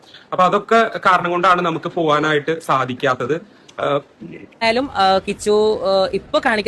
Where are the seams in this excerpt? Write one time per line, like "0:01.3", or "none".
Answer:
0:04.6